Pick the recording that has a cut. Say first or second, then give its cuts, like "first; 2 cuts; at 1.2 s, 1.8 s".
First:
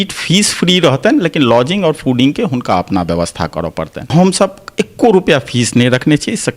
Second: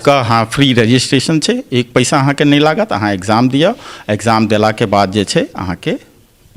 first; 1 cut; at 4.1 s